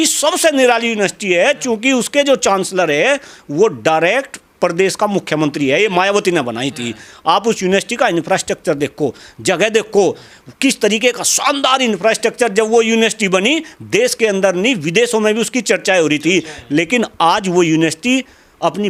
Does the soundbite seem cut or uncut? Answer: uncut